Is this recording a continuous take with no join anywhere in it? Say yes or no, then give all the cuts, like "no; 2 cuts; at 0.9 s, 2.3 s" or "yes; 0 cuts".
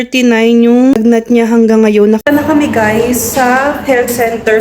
no; 2 cuts; at 0.9 s, 2.2 s